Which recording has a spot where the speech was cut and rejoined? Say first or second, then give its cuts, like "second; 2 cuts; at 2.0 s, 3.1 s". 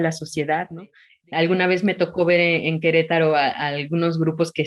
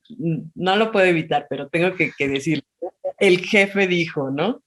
first; 1 cut; at 1.0 s